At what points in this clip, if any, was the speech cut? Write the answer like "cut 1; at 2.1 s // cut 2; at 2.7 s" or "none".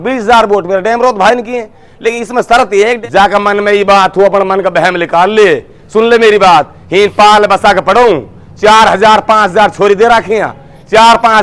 cut 1; at 3.0 s